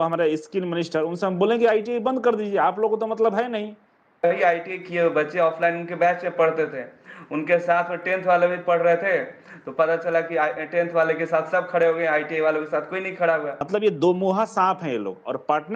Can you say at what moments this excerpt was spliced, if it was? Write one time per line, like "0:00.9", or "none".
0:04.2
0:13.7